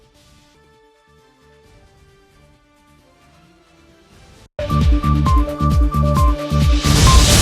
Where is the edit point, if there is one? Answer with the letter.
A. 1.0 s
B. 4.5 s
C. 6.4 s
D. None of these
B